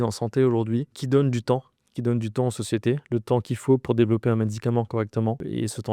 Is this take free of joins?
yes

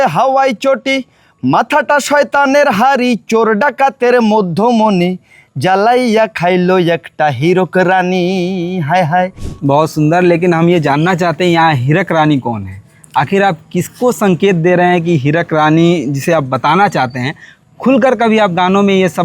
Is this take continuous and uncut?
no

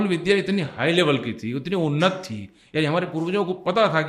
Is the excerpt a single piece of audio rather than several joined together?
yes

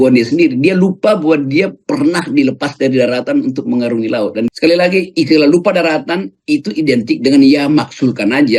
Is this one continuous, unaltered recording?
no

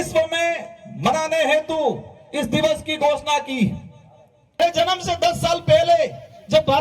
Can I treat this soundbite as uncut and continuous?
no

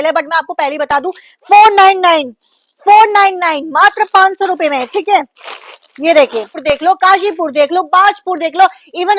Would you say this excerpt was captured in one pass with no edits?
no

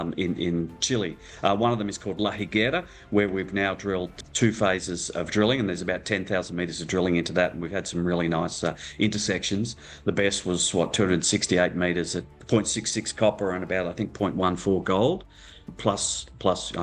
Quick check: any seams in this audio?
yes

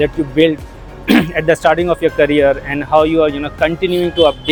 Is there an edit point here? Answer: no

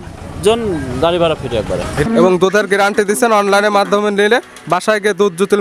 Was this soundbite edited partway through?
yes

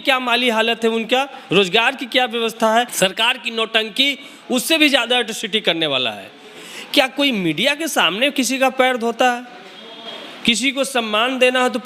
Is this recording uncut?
no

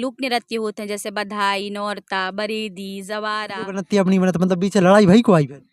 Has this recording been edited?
yes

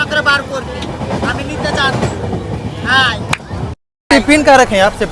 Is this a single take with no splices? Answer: yes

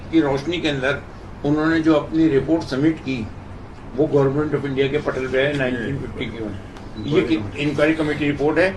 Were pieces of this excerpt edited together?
no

